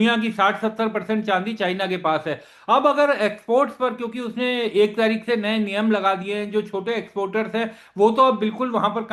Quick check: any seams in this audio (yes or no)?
no